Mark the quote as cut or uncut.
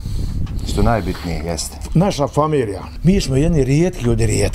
cut